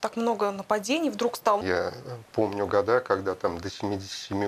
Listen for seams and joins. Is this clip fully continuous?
no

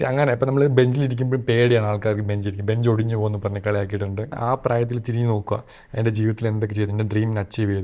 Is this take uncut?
no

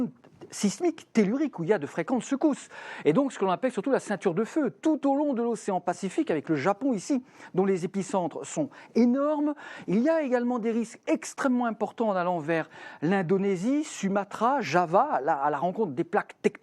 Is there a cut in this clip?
no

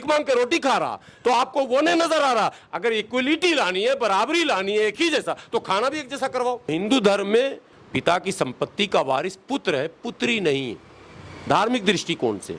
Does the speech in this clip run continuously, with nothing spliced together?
no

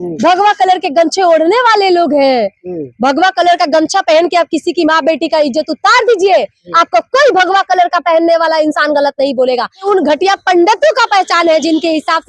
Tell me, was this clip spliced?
yes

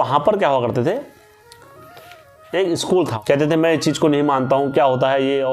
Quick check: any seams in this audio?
yes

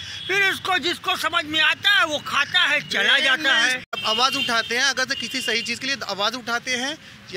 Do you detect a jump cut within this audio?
yes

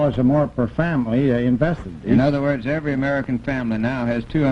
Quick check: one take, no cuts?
no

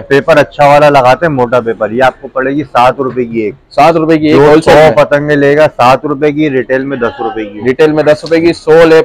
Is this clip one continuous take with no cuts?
yes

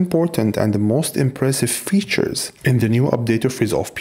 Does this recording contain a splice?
no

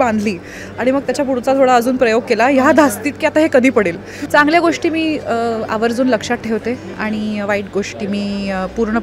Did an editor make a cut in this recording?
yes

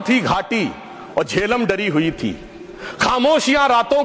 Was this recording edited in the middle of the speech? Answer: no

